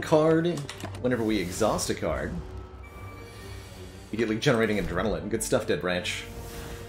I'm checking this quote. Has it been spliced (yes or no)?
no